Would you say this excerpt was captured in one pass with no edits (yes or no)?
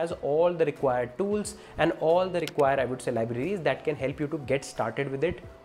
yes